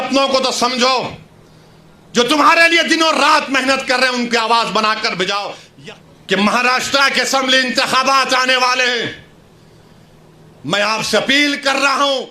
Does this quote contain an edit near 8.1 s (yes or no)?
no